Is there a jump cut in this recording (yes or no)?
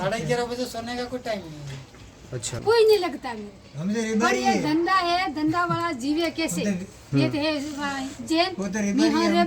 yes